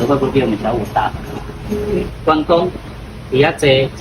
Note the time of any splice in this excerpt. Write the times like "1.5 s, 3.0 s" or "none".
2.1 s